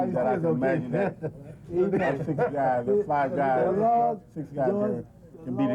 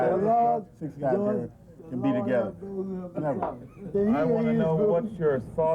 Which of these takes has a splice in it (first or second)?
second